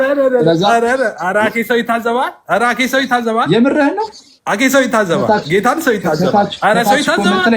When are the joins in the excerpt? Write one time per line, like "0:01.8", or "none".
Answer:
none